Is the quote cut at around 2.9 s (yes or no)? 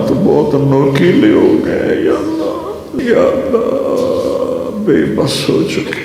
yes